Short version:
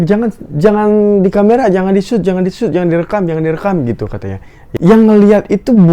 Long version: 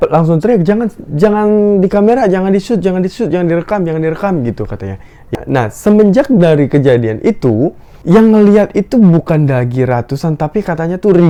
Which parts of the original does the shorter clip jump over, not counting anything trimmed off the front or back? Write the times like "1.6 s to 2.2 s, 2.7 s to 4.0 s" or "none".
5.2 s to 7.9 s